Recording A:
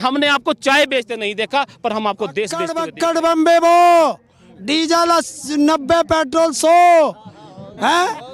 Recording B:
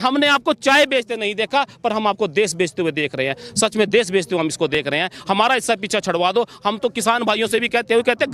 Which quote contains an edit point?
A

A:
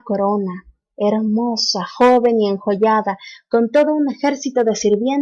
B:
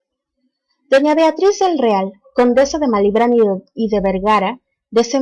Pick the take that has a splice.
A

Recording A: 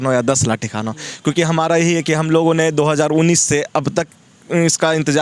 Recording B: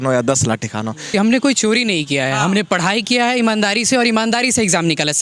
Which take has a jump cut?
B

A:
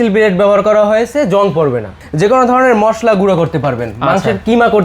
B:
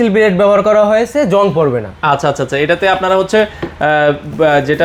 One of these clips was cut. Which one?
A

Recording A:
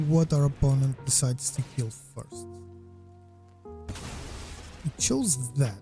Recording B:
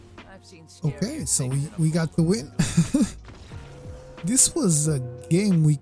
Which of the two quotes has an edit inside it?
A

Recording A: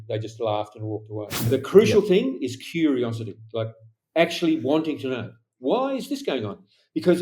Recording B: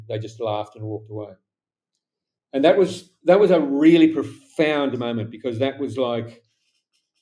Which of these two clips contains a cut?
A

